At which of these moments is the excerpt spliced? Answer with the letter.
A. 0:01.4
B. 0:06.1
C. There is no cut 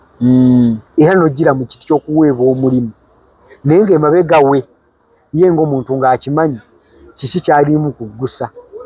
C